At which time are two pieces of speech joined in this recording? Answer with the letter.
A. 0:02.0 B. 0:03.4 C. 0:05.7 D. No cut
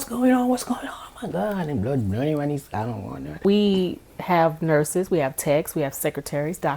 B